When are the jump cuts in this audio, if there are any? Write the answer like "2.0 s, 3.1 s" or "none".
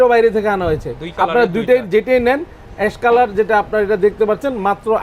none